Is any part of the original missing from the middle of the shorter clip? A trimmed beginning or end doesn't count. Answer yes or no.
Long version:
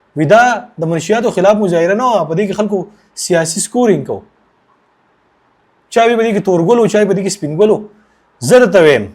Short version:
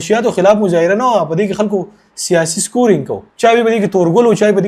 yes